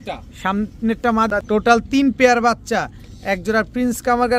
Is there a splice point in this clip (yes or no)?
yes